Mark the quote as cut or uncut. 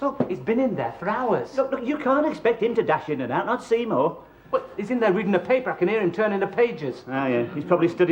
uncut